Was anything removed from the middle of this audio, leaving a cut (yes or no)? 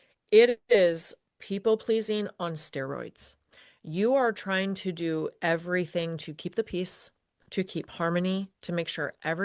no